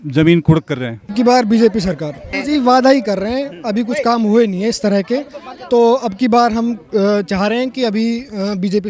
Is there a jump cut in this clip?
yes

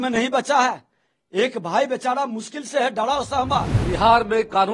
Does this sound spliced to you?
yes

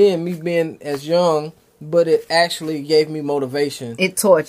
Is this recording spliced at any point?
no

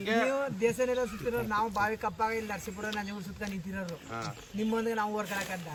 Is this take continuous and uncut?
yes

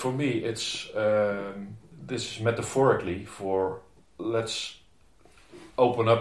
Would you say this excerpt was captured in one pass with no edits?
yes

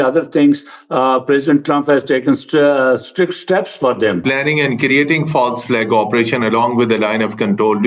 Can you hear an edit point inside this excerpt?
yes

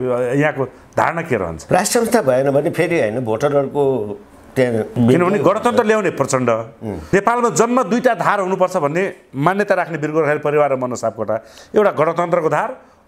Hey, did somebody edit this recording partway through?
no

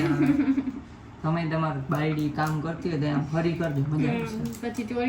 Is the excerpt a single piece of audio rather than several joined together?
yes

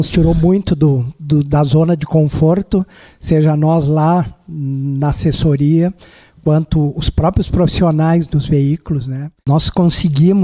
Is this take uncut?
no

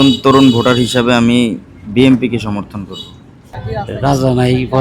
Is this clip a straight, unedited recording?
no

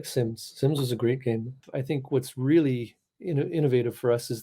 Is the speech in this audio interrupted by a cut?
yes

